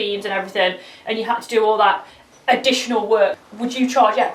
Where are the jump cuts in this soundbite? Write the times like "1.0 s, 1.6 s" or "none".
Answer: 3.3 s

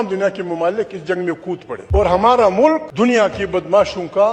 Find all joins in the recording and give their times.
1.7 s, 2.9 s

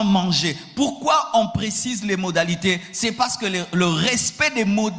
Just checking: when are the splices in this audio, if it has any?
none

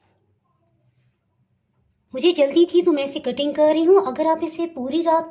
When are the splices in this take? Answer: 2.0 s

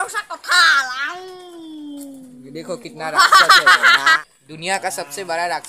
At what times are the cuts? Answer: 4.2 s

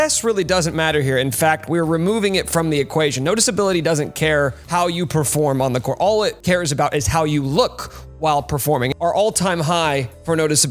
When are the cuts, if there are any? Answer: 8.9 s

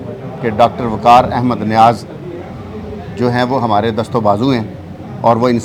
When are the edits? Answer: none

